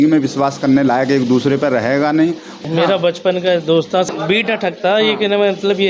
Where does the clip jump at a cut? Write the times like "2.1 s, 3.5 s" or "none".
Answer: 2.5 s, 4.1 s